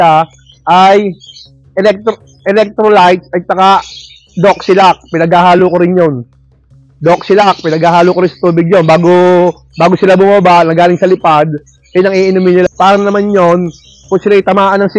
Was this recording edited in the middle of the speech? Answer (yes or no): yes